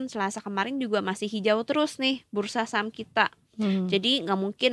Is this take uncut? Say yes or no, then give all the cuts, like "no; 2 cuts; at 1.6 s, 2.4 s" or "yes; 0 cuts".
yes; 0 cuts